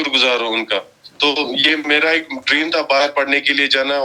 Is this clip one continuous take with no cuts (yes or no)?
yes